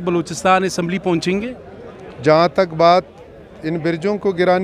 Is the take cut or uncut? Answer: uncut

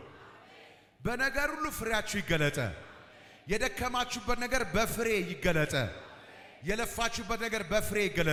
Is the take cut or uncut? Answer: uncut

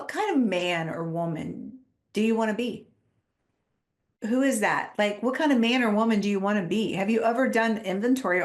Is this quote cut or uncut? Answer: uncut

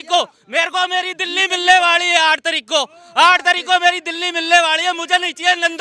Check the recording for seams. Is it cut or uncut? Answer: uncut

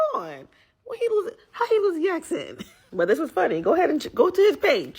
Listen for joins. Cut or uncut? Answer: uncut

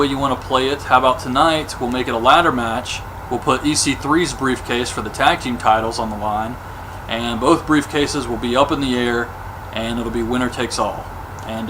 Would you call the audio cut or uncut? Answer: cut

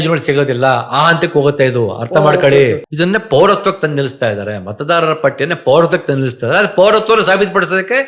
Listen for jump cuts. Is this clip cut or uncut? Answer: cut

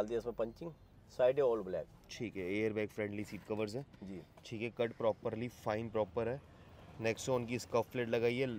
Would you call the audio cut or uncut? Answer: uncut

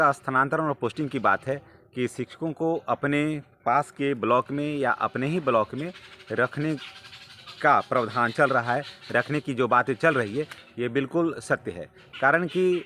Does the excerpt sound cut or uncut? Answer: uncut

